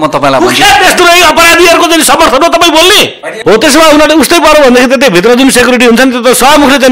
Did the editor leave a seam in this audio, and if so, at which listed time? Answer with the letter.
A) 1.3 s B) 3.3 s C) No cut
B